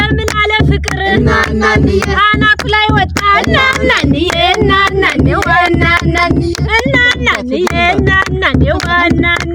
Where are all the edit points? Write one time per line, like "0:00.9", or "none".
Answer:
none